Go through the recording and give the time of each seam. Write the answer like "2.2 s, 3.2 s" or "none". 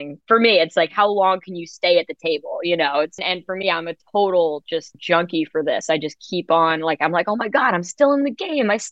3.1 s, 4.9 s